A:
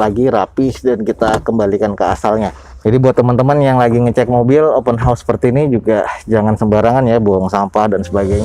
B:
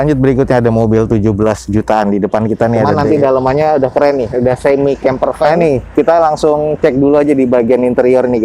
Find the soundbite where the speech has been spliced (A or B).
B